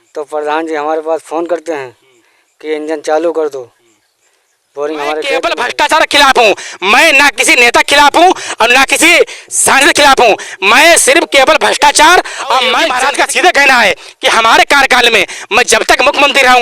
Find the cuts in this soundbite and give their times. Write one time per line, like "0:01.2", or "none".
0:05.5
0:12.9